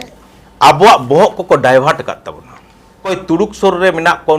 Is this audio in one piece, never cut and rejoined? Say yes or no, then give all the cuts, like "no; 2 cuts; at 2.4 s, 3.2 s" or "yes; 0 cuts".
no; 1 cut; at 3.1 s